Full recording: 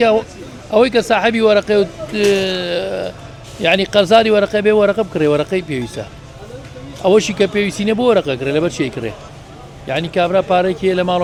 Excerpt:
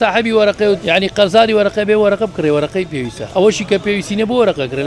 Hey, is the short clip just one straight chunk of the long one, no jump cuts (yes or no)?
no